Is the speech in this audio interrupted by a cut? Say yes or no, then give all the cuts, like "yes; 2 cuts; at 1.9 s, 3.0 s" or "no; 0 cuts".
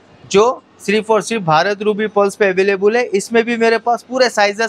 no; 0 cuts